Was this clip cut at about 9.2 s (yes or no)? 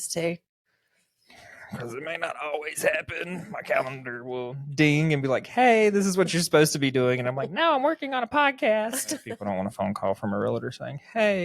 yes